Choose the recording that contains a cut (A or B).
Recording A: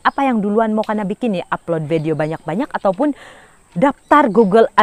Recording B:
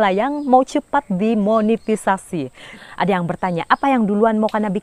B